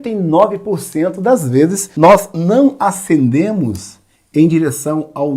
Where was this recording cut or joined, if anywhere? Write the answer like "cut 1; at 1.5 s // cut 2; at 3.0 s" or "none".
cut 1; at 1.8 s